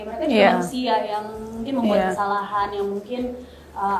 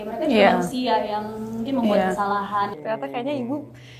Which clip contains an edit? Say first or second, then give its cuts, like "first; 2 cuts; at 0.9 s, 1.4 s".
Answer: second; 1 cut; at 2.7 s